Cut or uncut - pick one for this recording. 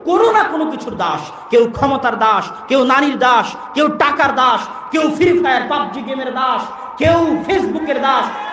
uncut